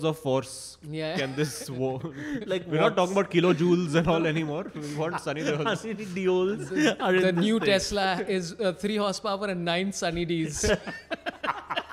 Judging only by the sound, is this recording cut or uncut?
uncut